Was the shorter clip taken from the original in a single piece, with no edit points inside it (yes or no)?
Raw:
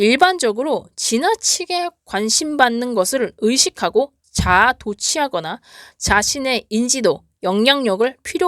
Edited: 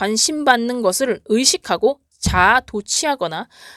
yes